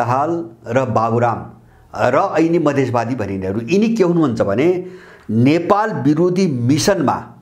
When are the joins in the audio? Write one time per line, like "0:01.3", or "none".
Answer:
none